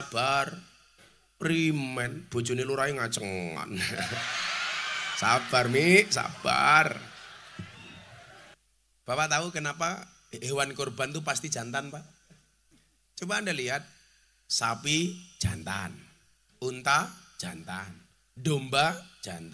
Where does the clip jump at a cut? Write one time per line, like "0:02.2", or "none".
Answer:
0:08.6